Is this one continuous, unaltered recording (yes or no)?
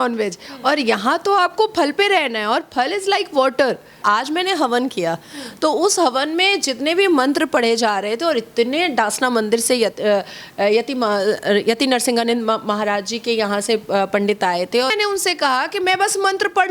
no